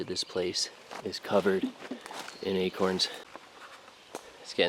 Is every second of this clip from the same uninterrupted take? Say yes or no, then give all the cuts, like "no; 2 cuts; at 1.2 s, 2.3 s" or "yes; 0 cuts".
no; 1 cut; at 3.3 s